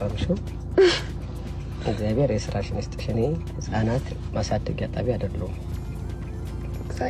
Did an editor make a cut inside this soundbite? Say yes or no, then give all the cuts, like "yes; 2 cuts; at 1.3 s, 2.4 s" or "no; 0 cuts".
no; 0 cuts